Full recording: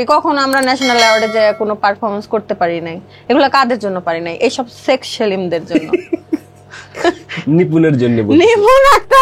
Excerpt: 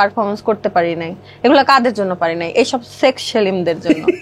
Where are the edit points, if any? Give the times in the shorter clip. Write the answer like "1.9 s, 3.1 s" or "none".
none